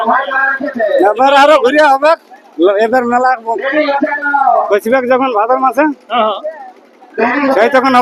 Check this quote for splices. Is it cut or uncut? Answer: uncut